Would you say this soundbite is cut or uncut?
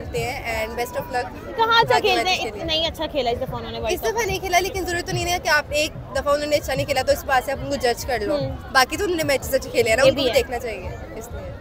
uncut